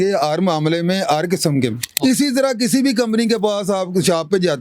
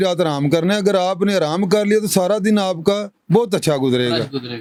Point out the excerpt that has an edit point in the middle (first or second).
first